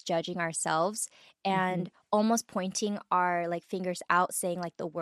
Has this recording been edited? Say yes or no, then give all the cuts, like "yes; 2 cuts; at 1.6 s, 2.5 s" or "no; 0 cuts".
no; 0 cuts